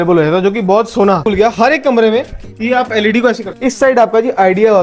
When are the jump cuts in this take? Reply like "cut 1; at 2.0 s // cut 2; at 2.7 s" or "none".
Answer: cut 1; at 1.3 s // cut 2; at 3.5 s